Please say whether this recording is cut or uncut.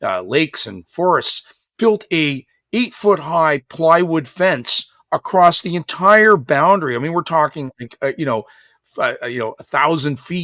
uncut